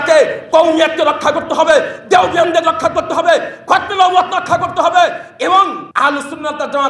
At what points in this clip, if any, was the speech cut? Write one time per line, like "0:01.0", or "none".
none